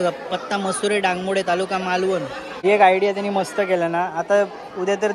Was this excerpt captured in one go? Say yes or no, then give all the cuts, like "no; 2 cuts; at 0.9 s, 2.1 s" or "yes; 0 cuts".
no; 1 cut; at 2.4 s